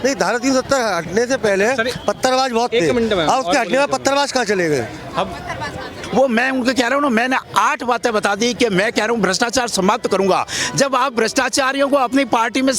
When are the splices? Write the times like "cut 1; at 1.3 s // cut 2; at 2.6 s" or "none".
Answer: cut 1; at 6.0 s